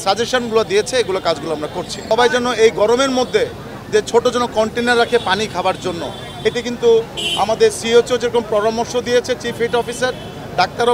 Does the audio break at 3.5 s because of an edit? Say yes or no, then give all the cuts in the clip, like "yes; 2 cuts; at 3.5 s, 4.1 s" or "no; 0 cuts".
no; 1 cut; at 1.9 s